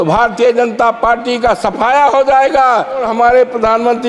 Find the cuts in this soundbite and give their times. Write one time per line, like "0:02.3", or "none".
0:03.1